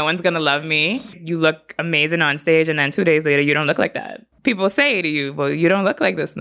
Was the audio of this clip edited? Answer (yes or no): yes